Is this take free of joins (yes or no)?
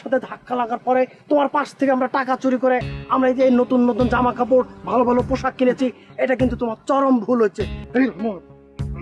no